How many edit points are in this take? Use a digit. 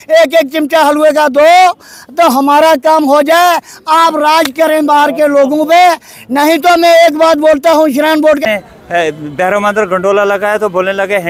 1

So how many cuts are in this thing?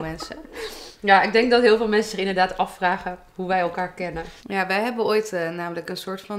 1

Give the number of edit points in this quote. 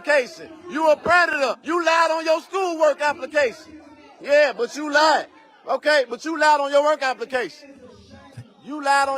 1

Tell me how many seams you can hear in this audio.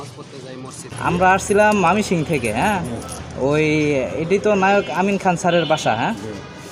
1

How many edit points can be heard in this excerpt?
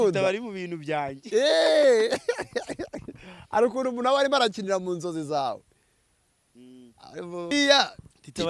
1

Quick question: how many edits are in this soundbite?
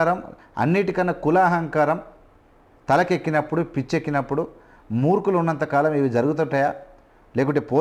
0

